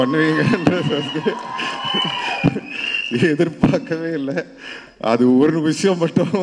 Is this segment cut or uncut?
uncut